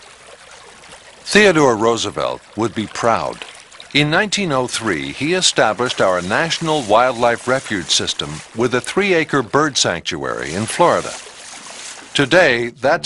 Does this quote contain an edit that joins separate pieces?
yes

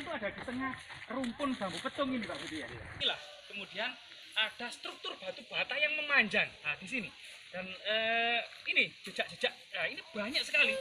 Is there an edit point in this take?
no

